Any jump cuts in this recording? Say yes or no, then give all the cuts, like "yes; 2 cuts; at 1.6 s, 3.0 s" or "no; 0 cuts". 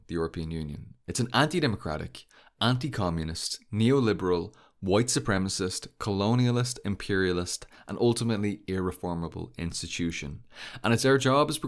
no; 0 cuts